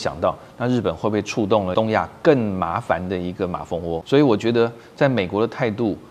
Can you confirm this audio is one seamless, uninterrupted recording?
no; 2 cuts; at 1.7 s, 4.0 s

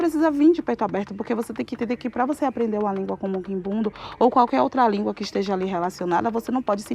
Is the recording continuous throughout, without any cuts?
yes; 0 cuts

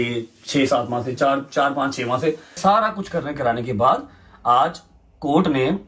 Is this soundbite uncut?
no; 1 cut; at 2.6 s

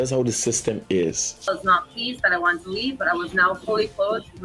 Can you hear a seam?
yes; 1 cut; at 1.5 s

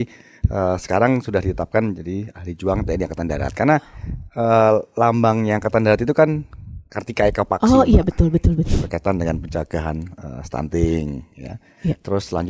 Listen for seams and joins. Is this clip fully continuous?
no; 1 cut; at 8.7 s

